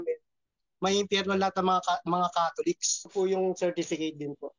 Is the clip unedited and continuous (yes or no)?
no